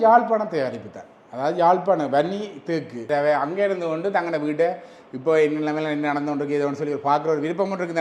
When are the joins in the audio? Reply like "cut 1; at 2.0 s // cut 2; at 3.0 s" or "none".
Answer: cut 1; at 3.0 s